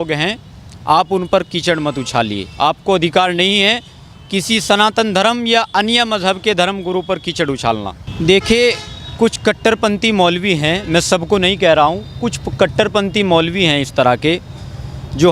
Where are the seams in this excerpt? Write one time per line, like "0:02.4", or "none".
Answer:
0:07.9